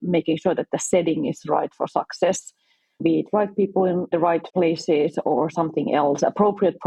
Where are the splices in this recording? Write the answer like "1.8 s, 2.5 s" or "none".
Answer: none